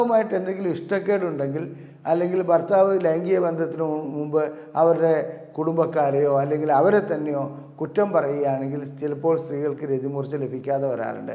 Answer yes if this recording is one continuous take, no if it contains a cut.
yes